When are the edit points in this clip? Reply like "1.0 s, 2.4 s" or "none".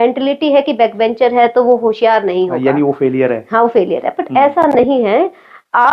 none